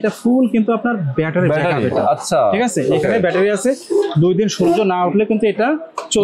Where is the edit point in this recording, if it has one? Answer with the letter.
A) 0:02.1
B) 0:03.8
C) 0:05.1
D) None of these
D